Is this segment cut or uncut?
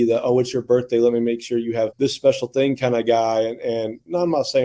cut